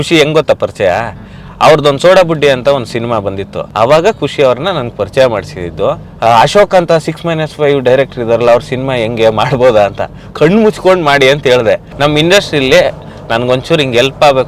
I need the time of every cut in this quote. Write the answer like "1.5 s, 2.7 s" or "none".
3.6 s, 6.1 s, 11.9 s